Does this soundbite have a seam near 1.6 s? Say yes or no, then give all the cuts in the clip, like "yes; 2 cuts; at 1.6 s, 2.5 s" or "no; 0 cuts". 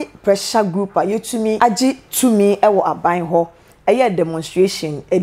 yes; 1 cut; at 1.6 s